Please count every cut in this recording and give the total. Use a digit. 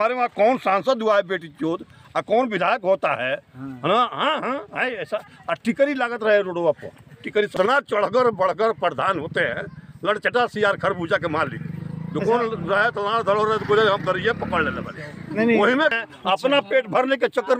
2